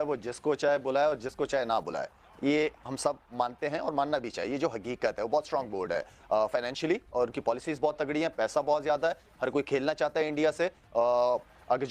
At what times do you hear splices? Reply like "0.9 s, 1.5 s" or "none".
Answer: none